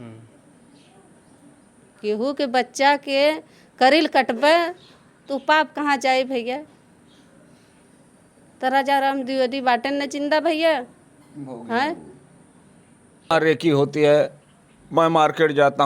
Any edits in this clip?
yes; 1 cut; at 13.3 s

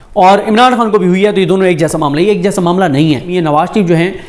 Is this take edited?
yes; 1 cut; at 3.3 s

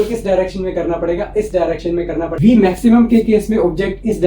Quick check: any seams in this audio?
yes; 1 cut; at 2.3 s

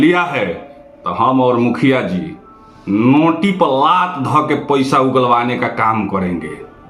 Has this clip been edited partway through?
no; 0 cuts

